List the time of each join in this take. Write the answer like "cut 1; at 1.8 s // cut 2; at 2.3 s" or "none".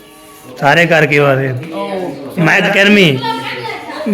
cut 1; at 2.7 s